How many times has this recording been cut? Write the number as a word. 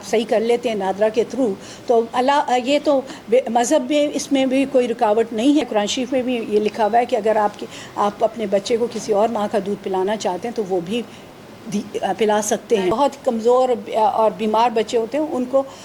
two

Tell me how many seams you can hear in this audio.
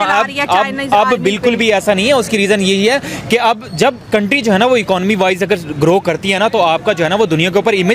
zero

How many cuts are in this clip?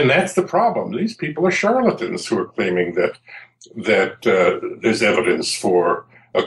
zero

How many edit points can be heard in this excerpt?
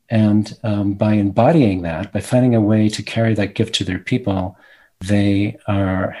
one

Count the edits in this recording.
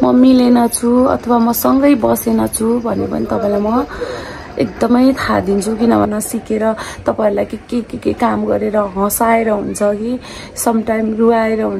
one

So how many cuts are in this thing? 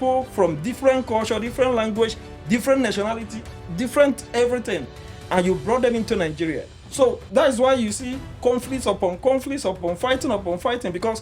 one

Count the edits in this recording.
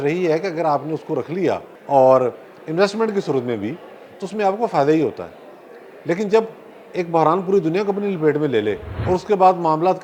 two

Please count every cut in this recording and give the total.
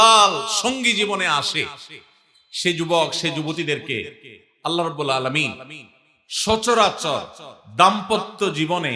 zero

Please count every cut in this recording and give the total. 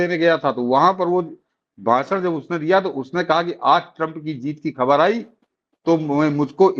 zero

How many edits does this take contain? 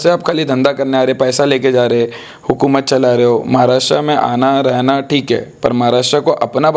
zero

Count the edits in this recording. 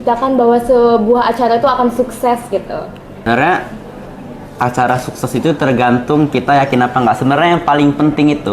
one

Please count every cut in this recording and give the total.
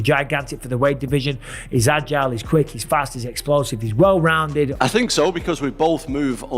one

